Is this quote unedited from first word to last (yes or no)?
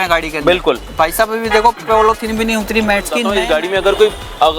no